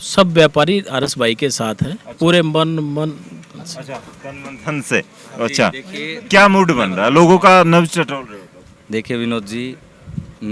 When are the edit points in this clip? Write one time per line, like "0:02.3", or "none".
none